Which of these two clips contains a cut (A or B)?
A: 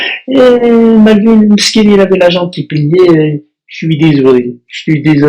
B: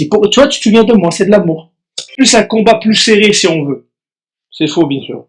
B